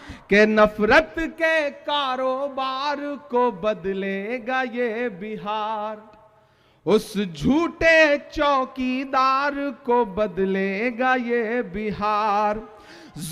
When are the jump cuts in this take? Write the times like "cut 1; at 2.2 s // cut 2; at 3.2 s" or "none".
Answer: none